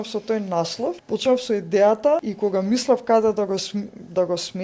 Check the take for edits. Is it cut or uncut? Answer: cut